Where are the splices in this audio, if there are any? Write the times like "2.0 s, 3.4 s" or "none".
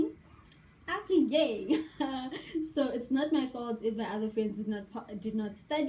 none